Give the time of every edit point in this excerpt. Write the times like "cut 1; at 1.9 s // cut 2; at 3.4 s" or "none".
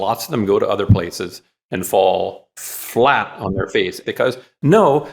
cut 1; at 4.0 s